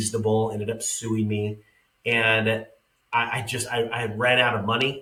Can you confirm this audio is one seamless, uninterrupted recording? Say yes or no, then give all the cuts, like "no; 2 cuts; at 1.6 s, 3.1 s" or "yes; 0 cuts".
yes; 0 cuts